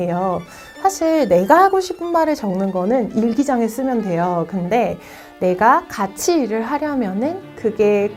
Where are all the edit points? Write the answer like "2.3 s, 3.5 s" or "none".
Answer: none